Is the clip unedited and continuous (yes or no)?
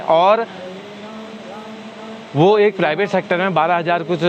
yes